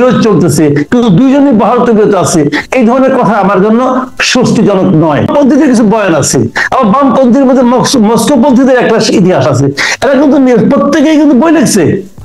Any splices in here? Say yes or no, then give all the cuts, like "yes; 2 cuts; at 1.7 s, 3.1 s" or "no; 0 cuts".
yes; 1 cut; at 5.3 s